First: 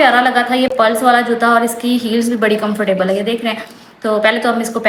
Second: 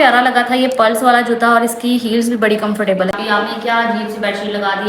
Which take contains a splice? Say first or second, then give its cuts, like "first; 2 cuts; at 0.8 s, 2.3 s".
second; 1 cut; at 3.1 s